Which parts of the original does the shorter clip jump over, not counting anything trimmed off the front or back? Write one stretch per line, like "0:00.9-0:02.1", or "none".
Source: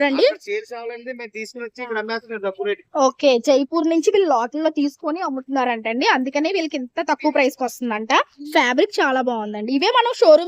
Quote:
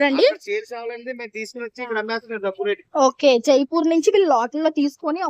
none